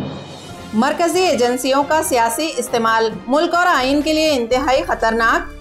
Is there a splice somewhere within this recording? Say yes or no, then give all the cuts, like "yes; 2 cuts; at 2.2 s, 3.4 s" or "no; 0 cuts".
no; 0 cuts